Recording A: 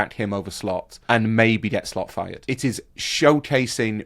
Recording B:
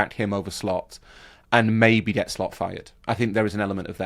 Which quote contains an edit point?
A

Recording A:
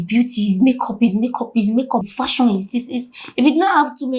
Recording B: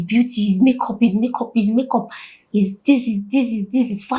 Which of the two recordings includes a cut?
A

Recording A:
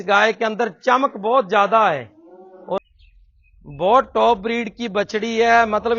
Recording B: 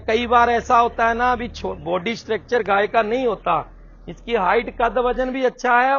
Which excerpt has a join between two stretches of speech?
A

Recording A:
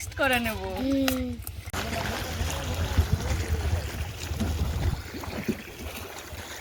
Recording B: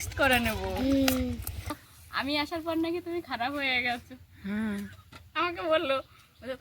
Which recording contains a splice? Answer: B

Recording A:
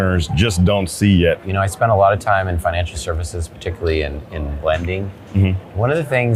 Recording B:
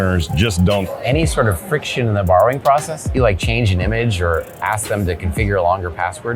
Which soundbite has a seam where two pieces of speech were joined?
B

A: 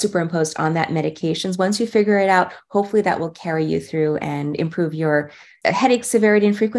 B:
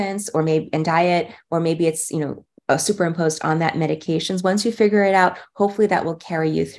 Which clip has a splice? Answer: A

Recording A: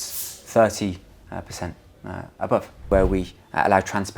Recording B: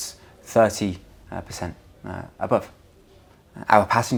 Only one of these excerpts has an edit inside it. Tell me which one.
A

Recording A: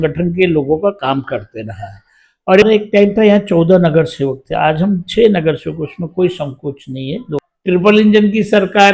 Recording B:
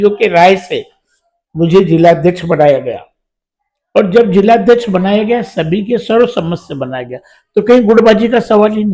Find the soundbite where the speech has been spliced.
A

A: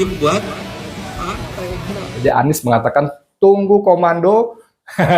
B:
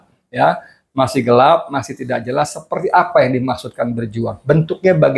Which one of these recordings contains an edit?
A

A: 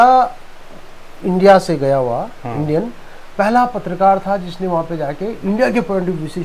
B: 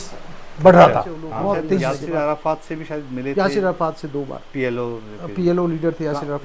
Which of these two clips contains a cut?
B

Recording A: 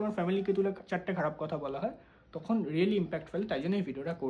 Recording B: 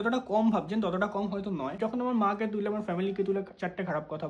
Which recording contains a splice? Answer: B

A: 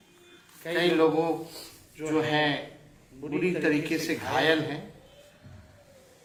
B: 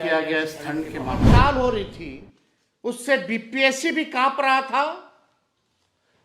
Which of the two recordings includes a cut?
B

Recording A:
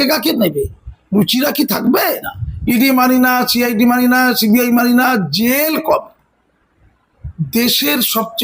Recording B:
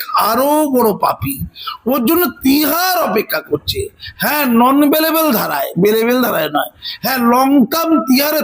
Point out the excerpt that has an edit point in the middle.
A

